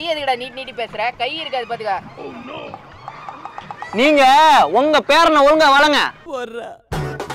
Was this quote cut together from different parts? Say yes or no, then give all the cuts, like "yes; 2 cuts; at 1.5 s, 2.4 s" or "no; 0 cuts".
yes; 1 cut; at 6.2 s